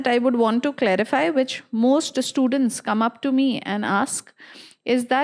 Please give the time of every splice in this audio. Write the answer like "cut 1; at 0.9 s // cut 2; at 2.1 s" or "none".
none